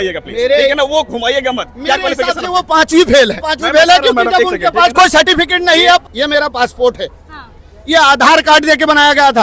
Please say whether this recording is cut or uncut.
cut